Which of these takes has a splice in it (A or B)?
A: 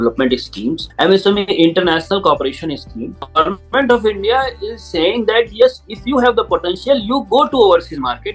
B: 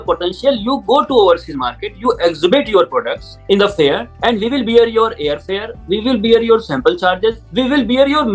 A